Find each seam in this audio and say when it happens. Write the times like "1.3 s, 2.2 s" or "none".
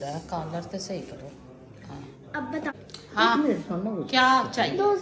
2.7 s